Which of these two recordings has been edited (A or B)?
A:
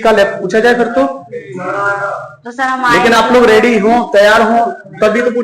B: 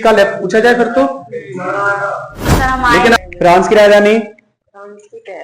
B